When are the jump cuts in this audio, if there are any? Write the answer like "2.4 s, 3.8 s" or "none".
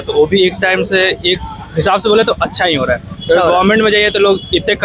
none